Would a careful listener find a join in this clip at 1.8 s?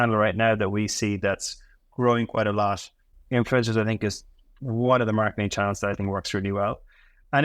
no; 1 cut; at 3.1 s

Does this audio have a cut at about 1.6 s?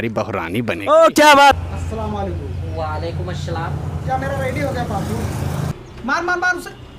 yes; 2 cuts; at 1.6 s, 5.7 s

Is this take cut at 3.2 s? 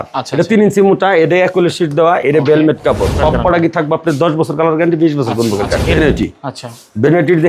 yes; 2 cuts; at 3.2 s, 5.8 s

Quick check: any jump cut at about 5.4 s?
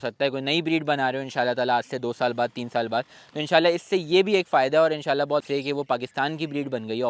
yes; 1 cut; at 5.4 s

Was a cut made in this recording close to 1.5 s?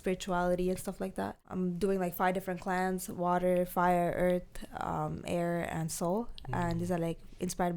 yes; 1 cut; at 1.5 s

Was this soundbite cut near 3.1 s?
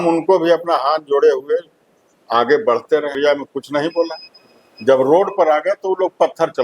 yes; 1 cut; at 3.1 s

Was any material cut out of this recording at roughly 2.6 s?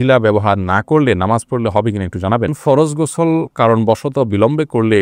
yes; 1 cut; at 2.6 s

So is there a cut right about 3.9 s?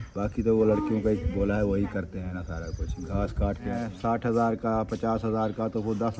yes; 1 cut; at 3.9 s

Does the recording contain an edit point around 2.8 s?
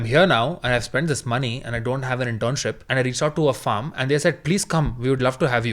yes; 1 cut; at 2.8 s

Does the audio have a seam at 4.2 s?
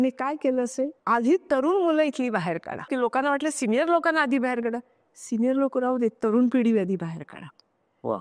no; 2 cuts; at 1.0 s, 2.9 s

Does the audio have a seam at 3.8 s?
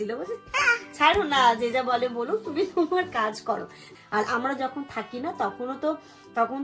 yes; 1 cut; at 3.8 s

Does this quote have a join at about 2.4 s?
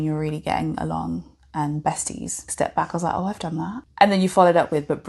yes; 2 cuts; at 2.4 s, 3.8 s

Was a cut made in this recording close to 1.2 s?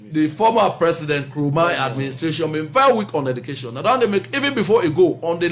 no; 0 cuts

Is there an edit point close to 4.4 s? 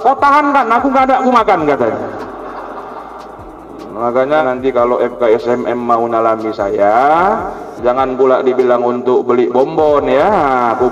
yes; 1 cut; at 4.4 s

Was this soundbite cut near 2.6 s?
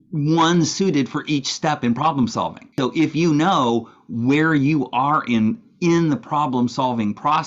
yes; 1 cut; at 2.6 s

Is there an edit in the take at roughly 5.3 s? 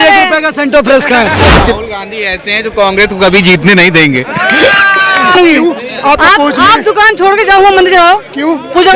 yes; 2 cuts; at 1.5 s, 5.3 s

